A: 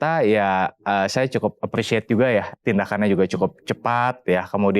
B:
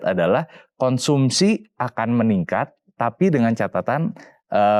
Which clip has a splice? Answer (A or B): A